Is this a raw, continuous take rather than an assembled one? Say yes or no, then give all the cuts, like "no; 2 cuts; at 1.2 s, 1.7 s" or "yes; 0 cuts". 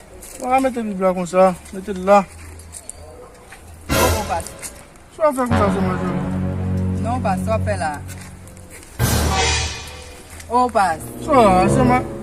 yes; 0 cuts